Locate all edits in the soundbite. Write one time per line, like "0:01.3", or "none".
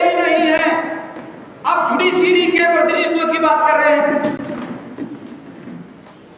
none